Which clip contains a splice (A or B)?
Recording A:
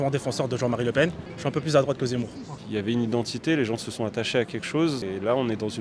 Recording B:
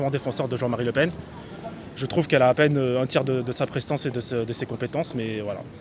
A